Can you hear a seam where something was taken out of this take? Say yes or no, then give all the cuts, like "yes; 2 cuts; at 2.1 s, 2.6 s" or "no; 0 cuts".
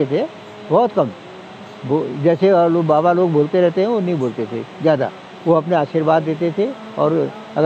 no; 0 cuts